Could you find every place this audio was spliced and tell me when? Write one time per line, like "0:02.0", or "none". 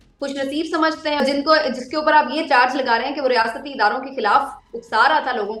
0:01.2